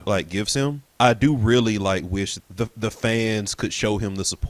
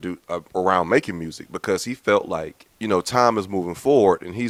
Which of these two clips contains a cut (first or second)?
first